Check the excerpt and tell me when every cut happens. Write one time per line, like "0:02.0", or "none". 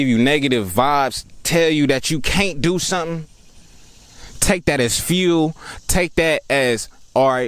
none